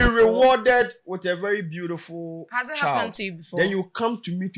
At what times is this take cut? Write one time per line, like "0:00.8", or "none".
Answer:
none

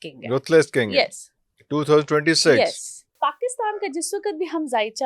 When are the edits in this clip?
0:03.1

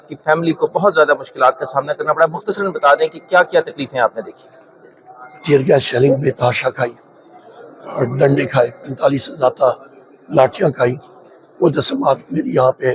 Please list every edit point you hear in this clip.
none

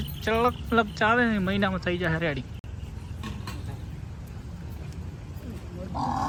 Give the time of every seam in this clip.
none

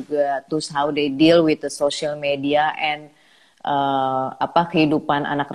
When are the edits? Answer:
none

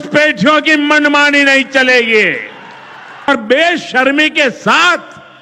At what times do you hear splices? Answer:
0:03.3

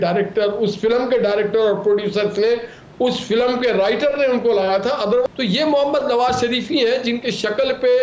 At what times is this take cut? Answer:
0:05.2

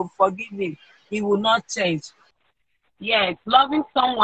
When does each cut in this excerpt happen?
0:02.2

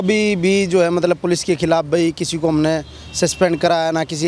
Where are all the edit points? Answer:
none

